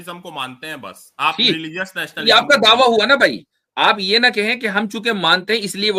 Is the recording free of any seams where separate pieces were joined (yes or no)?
yes